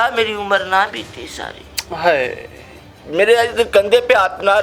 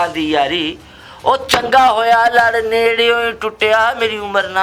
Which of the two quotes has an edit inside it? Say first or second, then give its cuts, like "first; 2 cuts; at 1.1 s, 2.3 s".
first; 1 cut; at 2.9 s